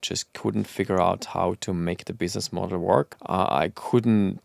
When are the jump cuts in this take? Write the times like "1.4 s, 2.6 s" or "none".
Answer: 3.2 s